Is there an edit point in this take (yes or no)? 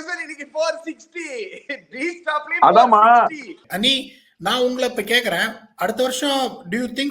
yes